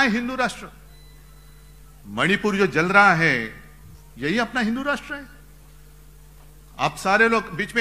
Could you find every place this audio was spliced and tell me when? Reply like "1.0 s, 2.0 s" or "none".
none